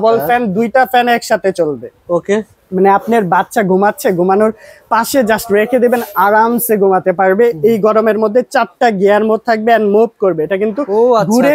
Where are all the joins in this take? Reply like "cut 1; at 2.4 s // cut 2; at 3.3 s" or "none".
none